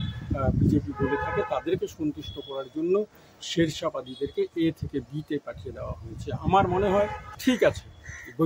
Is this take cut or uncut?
cut